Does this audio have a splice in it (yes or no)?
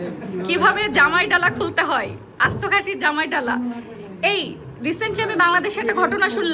no